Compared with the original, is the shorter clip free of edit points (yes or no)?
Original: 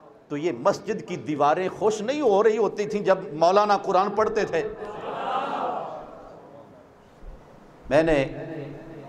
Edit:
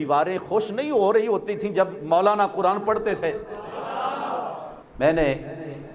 no